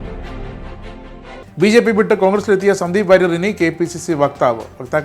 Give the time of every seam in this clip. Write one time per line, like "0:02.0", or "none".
0:01.4